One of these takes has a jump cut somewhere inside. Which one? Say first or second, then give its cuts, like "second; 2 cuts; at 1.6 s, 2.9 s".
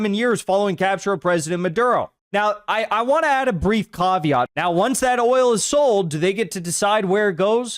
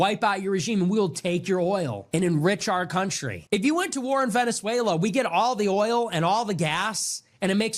first; 1 cut; at 4.5 s